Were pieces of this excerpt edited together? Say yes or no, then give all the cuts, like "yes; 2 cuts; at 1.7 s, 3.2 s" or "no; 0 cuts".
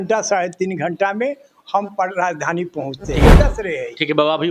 yes; 1 cut; at 3.2 s